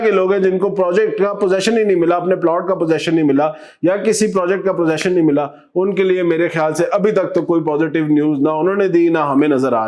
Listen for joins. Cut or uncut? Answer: uncut